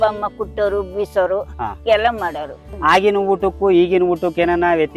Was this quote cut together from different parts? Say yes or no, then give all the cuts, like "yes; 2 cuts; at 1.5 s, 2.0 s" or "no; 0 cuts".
yes; 1 cut; at 2.6 s